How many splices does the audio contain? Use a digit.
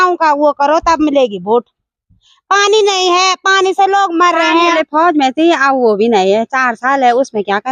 1